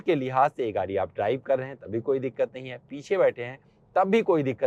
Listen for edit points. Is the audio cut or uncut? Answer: uncut